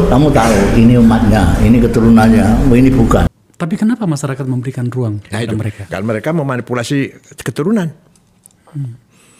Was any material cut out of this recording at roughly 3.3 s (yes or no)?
yes